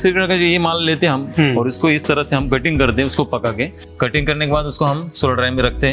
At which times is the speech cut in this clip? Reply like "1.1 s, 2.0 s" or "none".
1.3 s, 3.9 s